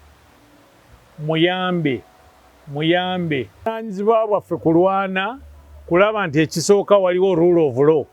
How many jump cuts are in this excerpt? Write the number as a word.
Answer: one